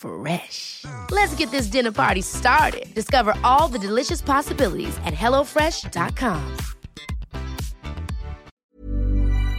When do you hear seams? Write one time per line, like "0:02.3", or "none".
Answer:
0:08.7